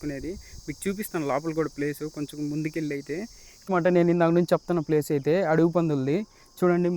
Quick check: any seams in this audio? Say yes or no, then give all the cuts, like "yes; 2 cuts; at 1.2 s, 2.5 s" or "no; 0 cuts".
yes; 1 cut; at 3.7 s